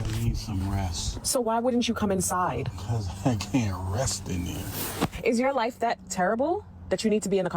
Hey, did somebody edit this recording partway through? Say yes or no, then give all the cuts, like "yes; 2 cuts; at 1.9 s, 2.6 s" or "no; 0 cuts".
yes; 2 cuts; at 1.1 s, 5.2 s